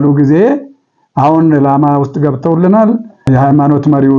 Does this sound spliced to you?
yes; 1 cut; at 3.3 s

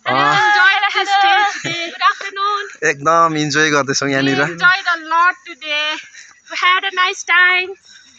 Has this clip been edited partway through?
no; 0 cuts

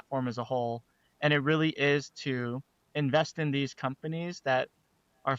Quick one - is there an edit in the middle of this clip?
no; 0 cuts

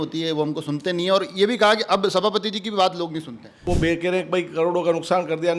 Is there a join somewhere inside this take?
yes; 1 cut; at 3.6 s

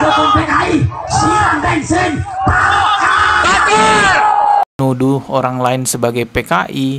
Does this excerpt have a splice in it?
yes; 1 cut; at 4.7 s

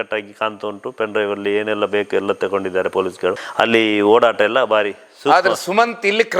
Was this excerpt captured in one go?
yes; 0 cuts

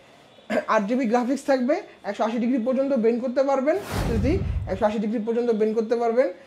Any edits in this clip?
yes; 1 cut; at 4.1 s

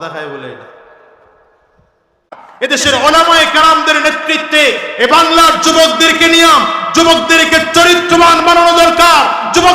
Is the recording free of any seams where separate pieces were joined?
no; 1 cut; at 2.6 s

